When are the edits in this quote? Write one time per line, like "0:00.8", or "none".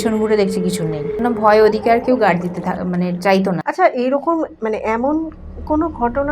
0:01.2
0:03.6